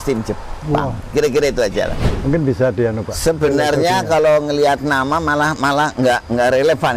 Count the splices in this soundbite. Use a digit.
1